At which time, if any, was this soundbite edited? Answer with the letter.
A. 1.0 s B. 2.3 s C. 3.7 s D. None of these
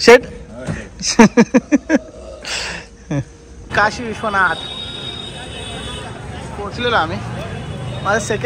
C